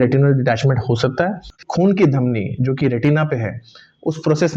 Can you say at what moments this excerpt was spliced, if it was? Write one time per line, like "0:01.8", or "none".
0:01.6